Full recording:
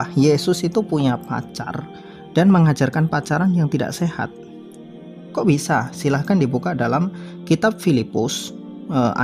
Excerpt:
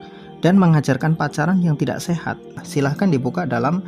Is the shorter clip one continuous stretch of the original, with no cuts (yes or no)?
no